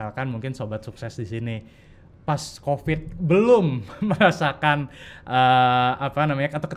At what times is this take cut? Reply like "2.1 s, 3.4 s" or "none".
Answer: none